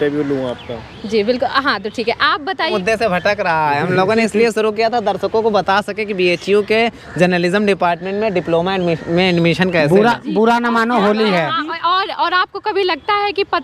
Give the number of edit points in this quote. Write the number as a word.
one